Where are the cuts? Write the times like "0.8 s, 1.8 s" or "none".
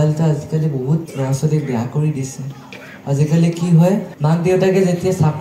1.1 s, 4.1 s

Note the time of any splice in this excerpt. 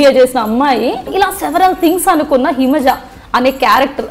1.1 s

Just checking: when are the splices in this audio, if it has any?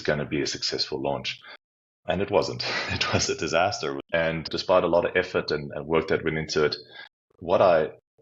3.9 s

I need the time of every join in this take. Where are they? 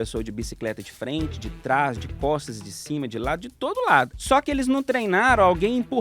4.1 s

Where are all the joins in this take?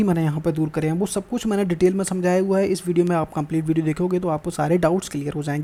none

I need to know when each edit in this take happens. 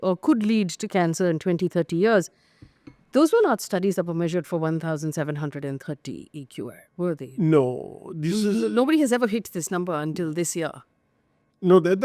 none

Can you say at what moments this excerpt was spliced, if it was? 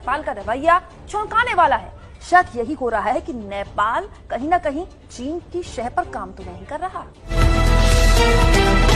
7.2 s

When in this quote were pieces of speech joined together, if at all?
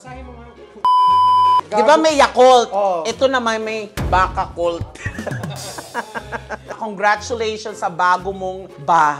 6.8 s

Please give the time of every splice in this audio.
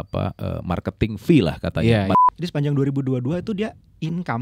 2.2 s

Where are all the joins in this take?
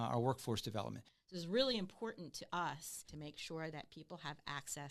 1.1 s, 3.1 s

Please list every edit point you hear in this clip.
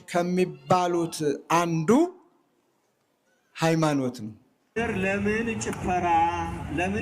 4.6 s

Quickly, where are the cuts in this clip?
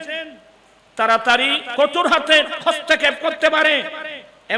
1.6 s

